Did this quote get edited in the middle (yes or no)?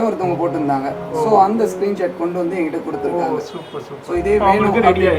no